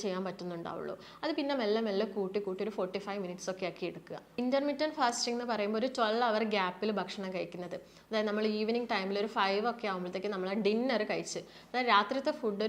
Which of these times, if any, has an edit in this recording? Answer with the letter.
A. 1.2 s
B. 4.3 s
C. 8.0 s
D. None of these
B